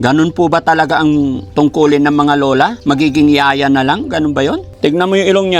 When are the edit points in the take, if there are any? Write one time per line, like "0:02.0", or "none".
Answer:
0:01.4
0:02.8
0:04.7